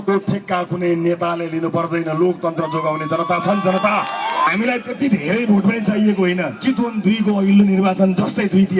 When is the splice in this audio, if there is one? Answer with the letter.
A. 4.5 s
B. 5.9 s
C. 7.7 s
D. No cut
A